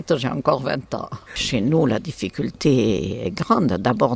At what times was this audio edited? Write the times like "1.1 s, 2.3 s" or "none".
1.3 s

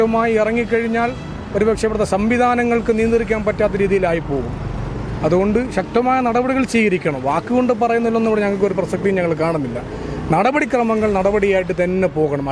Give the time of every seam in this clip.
none

